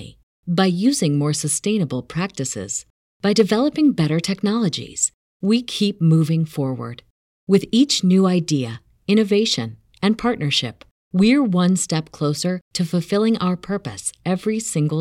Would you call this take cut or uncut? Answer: uncut